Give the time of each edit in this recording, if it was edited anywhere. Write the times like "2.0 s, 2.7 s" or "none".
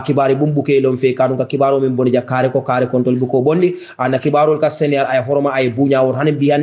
none